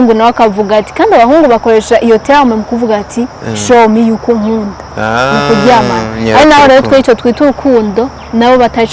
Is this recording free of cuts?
yes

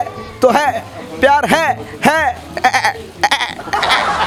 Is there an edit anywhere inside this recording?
no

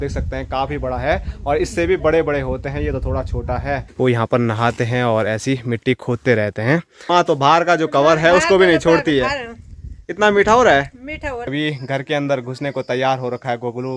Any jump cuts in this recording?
yes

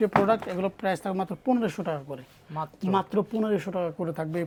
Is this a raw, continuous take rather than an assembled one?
yes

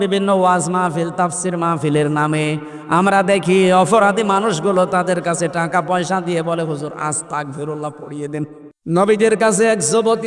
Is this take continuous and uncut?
no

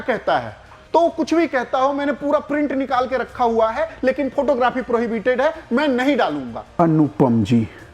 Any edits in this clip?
yes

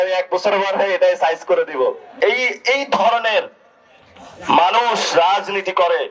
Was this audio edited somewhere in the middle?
yes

